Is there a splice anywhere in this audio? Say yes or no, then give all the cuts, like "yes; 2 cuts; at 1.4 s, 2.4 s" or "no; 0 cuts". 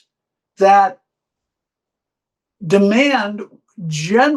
no; 0 cuts